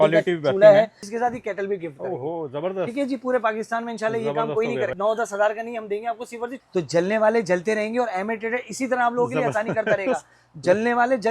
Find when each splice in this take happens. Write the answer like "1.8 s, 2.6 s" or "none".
1.0 s, 4.9 s, 6.5 s